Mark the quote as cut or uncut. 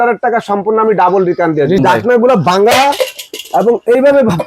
cut